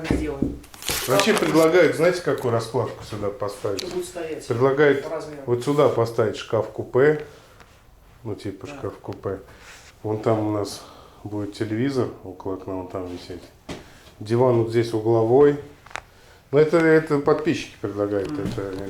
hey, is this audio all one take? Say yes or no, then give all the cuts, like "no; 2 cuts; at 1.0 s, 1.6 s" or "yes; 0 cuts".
no; 1 cut; at 1.0 s